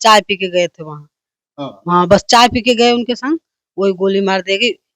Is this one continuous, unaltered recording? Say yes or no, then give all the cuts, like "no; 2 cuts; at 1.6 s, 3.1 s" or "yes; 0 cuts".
yes; 0 cuts